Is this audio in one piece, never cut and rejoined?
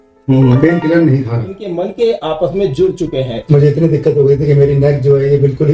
no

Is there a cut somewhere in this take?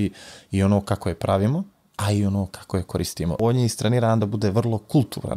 yes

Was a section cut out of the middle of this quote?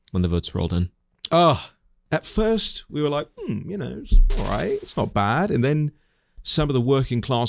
yes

